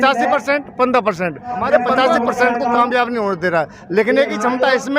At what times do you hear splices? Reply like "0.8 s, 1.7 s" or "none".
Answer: 1.9 s